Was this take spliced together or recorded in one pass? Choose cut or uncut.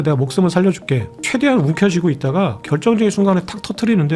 cut